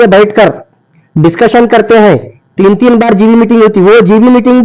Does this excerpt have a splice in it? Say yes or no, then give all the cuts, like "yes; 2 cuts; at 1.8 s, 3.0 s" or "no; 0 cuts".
no; 0 cuts